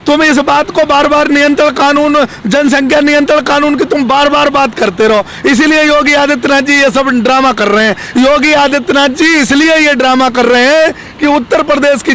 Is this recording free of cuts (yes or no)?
yes